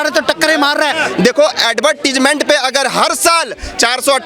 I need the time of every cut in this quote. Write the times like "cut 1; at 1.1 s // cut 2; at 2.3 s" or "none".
cut 1; at 1.0 s